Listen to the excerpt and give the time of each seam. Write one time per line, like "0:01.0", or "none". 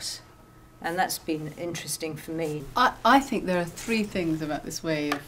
0:02.6